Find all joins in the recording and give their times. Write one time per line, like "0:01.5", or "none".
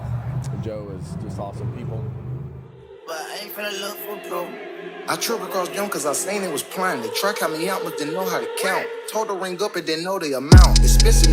0:03.0